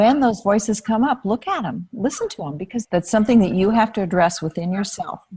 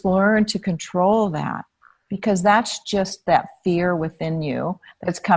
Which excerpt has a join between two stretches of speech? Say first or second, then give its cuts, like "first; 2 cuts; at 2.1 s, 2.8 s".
first; 1 cut; at 2.8 s